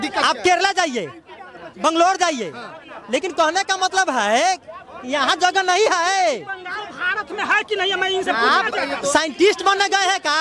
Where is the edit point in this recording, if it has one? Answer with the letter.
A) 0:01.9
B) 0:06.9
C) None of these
C